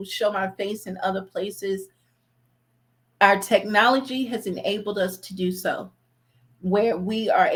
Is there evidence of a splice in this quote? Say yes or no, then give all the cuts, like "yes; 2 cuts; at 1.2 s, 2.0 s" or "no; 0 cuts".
no; 0 cuts